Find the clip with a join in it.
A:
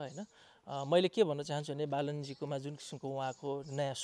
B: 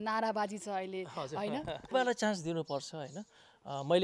B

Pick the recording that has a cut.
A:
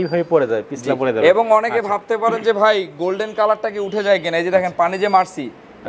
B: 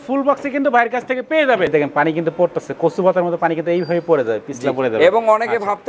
B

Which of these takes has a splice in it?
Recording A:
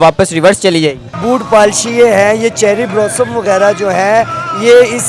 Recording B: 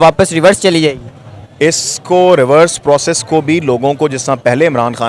A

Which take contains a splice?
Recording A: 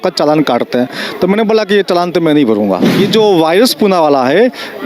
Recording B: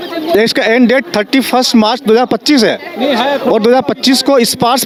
A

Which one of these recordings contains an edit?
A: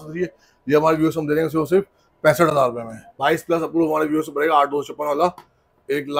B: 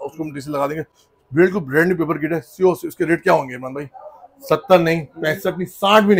A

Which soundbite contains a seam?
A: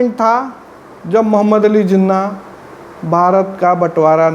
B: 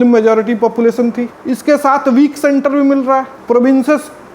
B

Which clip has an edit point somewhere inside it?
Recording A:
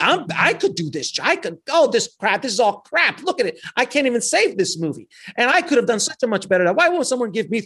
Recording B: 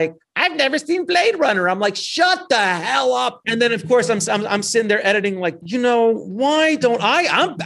B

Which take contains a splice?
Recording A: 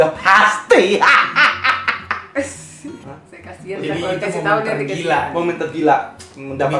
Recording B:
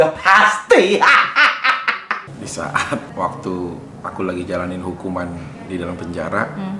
B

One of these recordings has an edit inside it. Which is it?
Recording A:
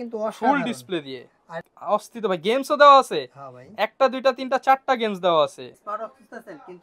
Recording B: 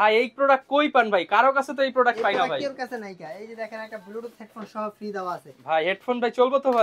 A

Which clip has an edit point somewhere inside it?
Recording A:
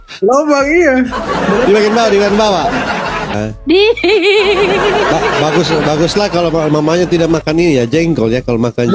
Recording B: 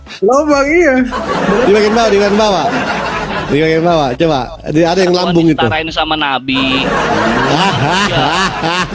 A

